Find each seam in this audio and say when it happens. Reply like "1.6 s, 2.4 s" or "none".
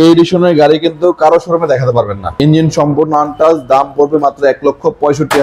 2.3 s